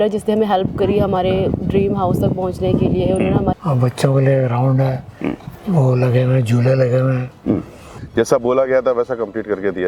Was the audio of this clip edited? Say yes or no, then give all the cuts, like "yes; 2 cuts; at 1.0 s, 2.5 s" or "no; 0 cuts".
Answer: yes; 2 cuts; at 3.6 s, 7.9 s